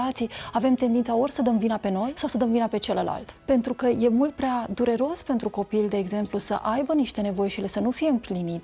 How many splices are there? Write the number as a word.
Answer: two